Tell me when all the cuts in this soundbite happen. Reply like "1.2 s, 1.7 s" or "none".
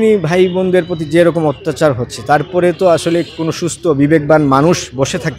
none